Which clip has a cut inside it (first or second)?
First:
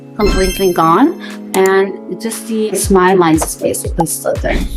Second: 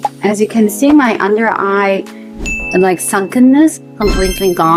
first